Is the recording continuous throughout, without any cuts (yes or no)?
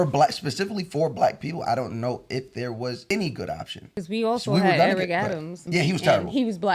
no